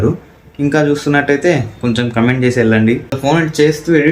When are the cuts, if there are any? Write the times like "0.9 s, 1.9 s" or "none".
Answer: 3.2 s